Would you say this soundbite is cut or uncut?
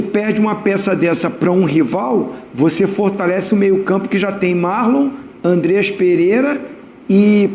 uncut